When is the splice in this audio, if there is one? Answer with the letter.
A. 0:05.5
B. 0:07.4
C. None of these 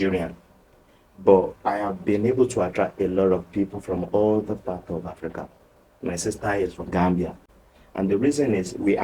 B